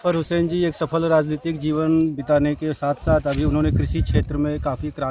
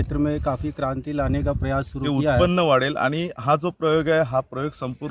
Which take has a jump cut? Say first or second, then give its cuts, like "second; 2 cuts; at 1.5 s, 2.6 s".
second; 1 cut; at 2.4 s